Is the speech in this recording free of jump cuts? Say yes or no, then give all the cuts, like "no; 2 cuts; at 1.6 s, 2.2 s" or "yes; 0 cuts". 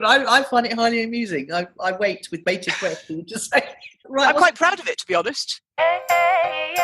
no; 2 cuts; at 4.0 s, 5.7 s